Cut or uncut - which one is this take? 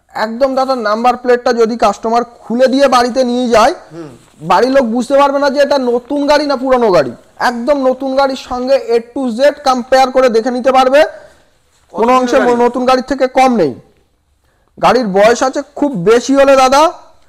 uncut